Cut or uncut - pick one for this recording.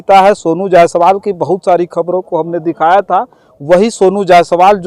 uncut